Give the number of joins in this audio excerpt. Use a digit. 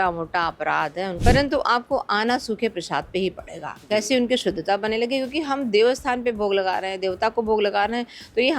1